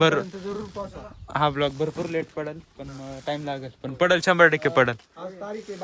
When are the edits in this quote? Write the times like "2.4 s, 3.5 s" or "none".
none